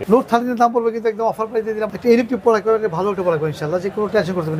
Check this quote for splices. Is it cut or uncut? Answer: cut